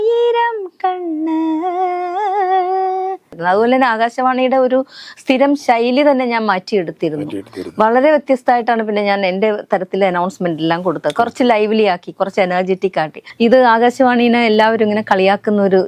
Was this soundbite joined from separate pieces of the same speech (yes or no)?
yes